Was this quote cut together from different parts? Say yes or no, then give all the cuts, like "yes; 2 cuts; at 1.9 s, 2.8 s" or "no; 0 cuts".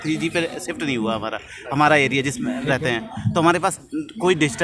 no; 0 cuts